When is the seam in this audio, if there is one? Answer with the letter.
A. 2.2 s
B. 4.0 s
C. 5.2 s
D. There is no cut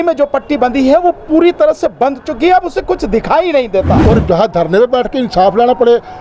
B